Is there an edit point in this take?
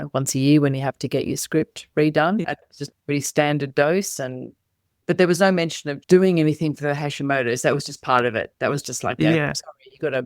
yes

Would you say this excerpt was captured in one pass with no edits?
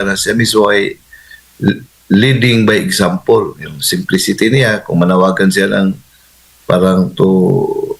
yes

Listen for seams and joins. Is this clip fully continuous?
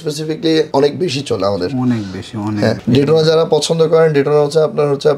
yes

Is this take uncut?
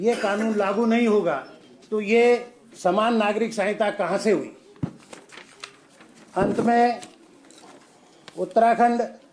yes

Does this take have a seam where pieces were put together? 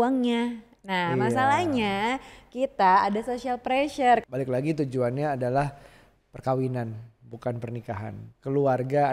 yes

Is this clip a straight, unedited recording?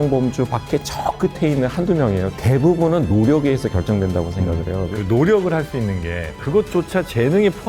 no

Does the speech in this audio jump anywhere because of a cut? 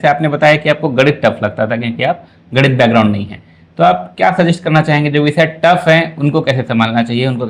no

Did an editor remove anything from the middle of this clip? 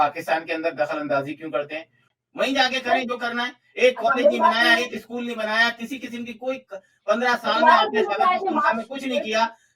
yes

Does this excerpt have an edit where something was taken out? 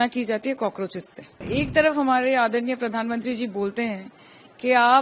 yes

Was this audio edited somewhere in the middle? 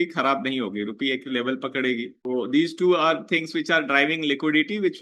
yes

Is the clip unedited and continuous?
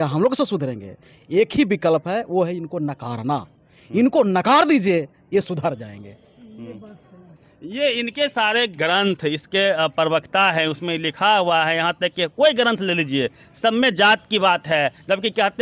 yes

